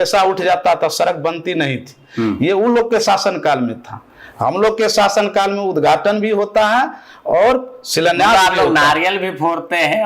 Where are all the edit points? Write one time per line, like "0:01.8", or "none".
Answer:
none

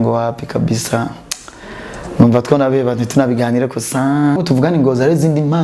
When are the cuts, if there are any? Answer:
0:04.4

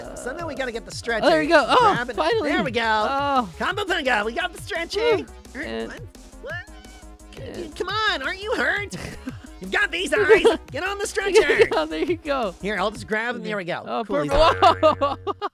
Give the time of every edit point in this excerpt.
0:05.4

